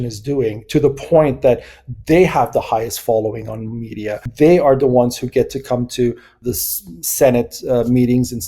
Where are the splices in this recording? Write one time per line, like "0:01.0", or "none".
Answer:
0:04.3
0:06.4